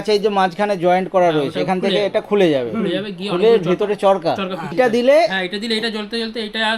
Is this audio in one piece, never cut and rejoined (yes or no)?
no